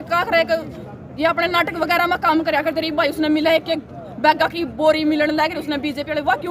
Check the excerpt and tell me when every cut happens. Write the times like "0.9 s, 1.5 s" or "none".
none

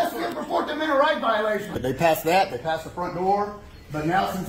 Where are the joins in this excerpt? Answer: 1.8 s

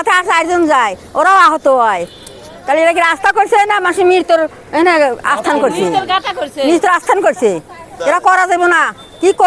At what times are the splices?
none

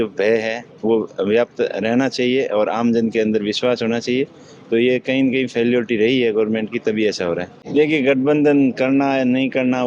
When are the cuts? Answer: 7.5 s

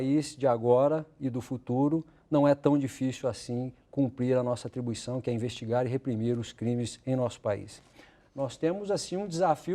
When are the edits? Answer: 8.0 s

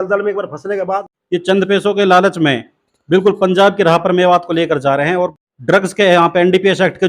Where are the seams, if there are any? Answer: 1.0 s, 5.3 s

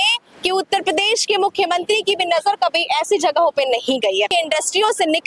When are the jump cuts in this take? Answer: 4.3 s

